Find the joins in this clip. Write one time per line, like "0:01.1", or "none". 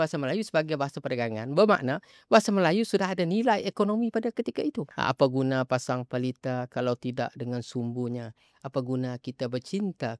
0:04.9